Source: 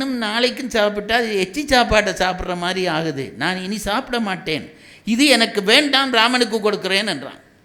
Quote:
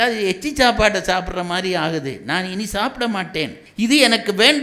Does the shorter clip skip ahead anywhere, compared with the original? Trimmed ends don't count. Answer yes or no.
yes